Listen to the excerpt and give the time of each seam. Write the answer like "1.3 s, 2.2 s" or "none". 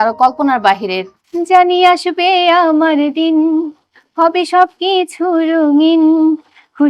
1.2 s